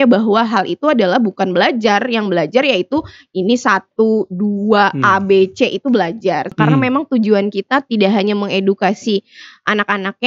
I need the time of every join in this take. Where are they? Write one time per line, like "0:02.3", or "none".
0:06.5